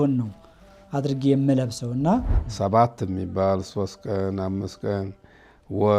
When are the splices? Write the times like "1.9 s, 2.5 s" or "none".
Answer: 2.4 s